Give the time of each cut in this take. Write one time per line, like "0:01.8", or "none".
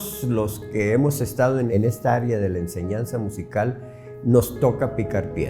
0:01.7